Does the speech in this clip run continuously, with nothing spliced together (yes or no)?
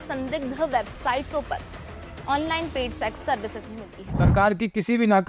no